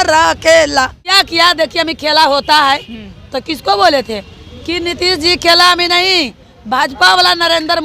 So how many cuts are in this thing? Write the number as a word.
one